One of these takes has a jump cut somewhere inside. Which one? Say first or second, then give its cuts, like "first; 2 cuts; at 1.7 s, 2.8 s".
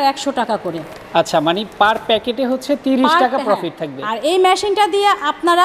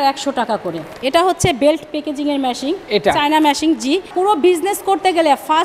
second; 2 cuts; at 1.0 s, 4.1 s